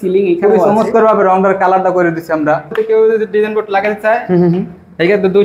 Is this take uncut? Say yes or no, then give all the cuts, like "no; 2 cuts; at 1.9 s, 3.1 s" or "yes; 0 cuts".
no; 1 cut; at 2.7 s